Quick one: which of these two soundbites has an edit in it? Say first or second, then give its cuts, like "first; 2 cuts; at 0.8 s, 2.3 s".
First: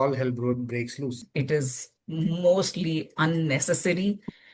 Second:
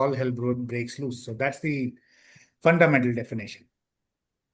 first; 1 cut; at 1.2 s